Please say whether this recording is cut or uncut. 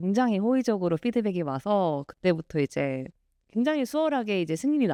uncut